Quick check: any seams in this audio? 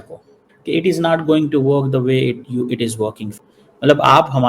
yes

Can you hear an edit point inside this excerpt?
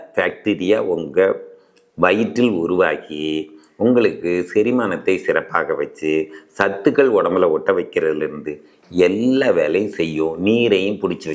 no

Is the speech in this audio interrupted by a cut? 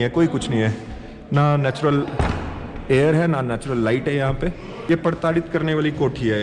no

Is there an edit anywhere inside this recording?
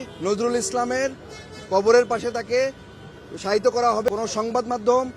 yes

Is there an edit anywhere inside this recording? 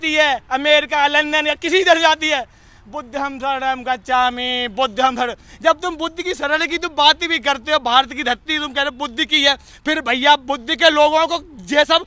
no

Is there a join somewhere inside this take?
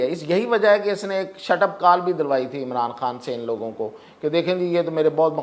no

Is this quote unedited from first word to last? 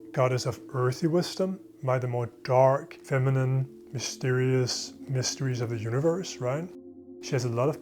no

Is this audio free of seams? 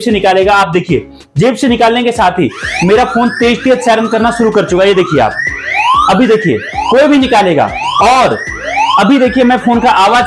yes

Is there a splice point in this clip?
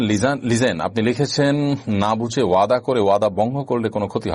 no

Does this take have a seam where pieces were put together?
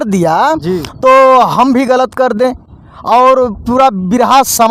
no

